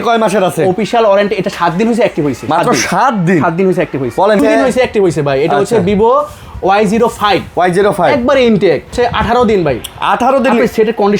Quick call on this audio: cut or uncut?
cut